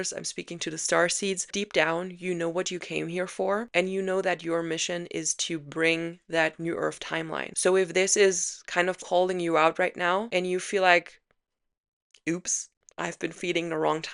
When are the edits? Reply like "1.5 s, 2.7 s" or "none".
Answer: 1.5 s, 7.4 s, 10.3 s